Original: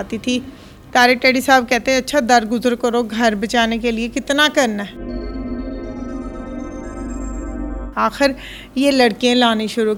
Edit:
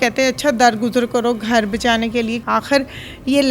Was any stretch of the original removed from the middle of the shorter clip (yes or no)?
yes